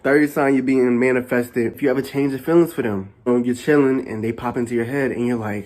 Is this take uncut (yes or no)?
no